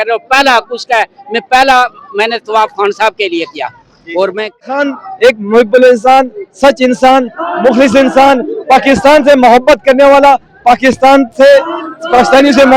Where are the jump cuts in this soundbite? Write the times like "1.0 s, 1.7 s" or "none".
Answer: 4.7 s